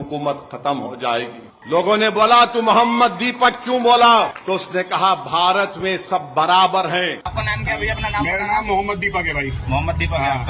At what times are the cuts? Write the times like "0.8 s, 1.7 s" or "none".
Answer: 1.5 s, 7.3 s